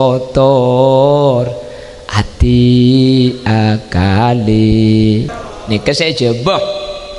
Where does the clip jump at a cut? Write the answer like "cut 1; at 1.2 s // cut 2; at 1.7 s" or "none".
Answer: cut 1; at 5.3 s